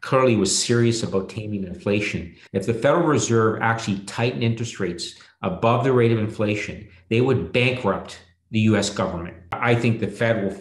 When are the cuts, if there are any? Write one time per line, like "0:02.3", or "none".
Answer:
0:02.3
0:09.6